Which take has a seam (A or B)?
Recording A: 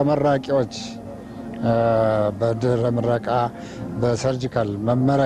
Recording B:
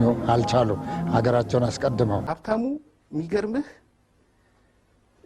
B